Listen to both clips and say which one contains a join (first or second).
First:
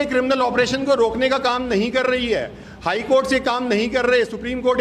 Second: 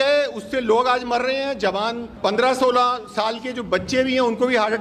second